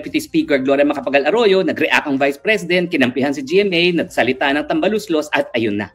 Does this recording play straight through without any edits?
yes; 0 cuts

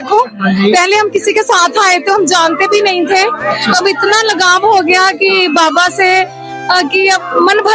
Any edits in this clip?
no; 0 cuts

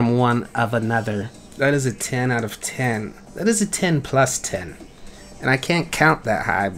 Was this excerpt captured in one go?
no; 1 cut; at 1.4 s

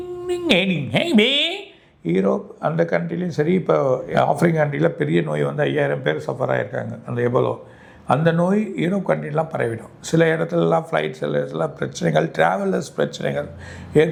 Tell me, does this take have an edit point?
no; 0 cuts

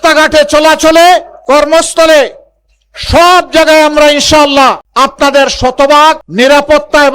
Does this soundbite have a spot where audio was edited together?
yes; 2 cuts; at 4.8 s, 6.3 s

